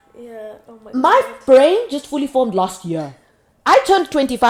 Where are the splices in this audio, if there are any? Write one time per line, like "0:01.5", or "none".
none